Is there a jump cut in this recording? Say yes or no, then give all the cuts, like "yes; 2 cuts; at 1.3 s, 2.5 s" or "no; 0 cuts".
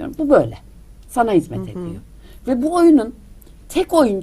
no; 0 cuts